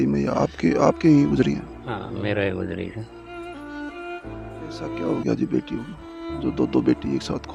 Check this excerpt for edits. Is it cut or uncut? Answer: uncut